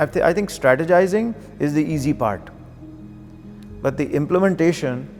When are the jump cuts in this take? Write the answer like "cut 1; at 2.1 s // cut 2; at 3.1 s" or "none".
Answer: none